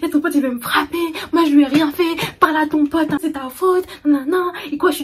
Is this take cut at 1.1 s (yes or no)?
no